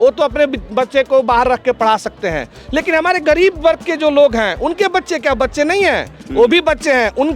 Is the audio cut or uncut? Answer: uncut